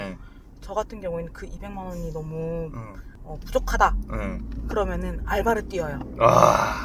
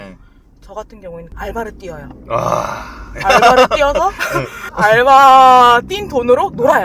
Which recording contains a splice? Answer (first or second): second